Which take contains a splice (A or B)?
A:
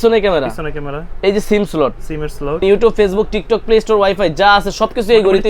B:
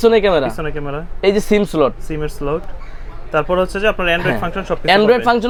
A